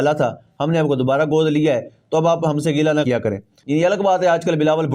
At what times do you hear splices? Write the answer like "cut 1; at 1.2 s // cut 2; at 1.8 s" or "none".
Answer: cut 1; at 3.5 s